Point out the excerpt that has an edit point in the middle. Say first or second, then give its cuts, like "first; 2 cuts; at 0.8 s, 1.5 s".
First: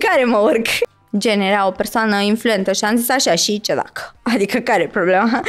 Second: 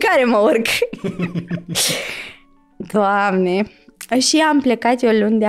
first; 1 cut; at 1.0 s